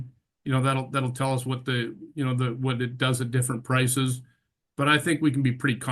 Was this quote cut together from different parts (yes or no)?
no